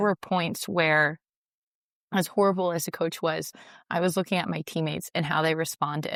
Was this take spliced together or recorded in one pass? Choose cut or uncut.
uncut